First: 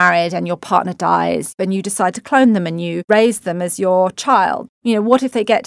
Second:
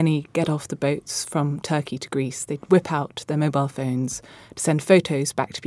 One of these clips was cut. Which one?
first; 1 cut; at 4.7 s

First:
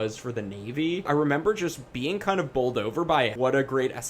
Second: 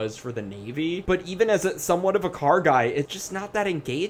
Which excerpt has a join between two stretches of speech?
first; 1 cut; at 1.0 s

